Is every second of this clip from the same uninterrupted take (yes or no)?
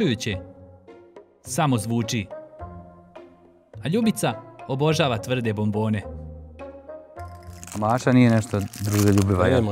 yes